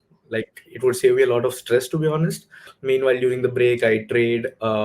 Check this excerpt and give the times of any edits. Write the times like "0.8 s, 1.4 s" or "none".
2.7 s